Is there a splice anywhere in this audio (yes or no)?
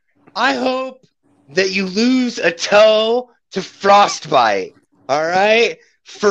no